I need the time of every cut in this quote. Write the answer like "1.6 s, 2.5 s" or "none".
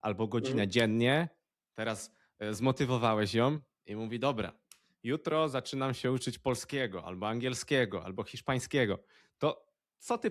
none